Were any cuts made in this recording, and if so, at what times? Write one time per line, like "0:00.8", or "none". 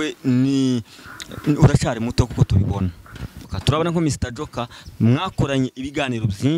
0:03.5